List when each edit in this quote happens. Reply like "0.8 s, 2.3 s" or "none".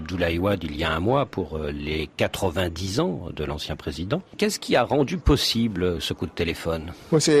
1.3 s